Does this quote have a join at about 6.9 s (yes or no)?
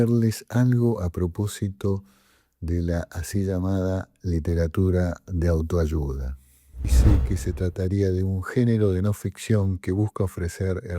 yes